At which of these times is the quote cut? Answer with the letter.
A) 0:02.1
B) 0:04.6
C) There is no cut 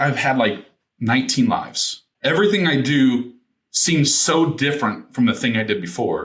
A